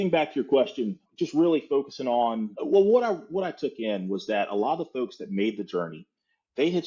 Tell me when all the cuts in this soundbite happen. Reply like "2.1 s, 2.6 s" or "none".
1.0 s, 2.5 s